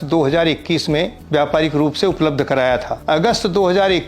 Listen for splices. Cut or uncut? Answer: cut